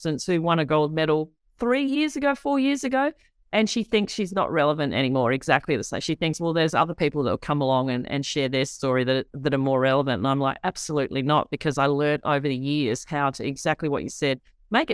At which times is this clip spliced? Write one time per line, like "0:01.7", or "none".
none

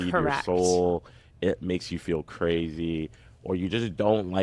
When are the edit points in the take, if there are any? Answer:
none

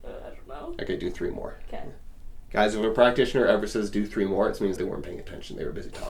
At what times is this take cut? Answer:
0:04.8

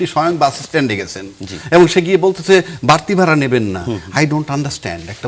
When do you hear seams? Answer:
none

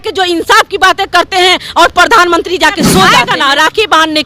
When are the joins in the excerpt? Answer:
0:03.2

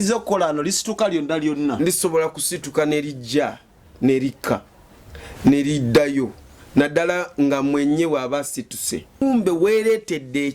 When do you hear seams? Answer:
0:09.2

